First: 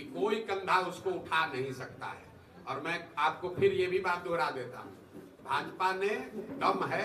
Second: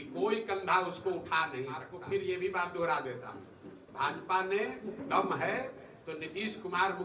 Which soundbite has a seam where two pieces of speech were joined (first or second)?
second